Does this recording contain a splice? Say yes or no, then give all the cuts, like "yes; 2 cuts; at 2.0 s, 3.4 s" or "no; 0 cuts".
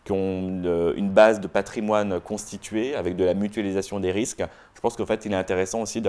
no; 0 cuts